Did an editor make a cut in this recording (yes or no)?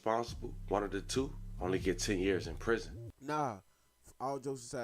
yes